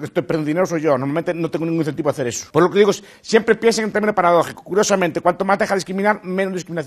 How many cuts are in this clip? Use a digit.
1